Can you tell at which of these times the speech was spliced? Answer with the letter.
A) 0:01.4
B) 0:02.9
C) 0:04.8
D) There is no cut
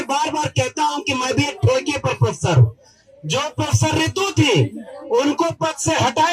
D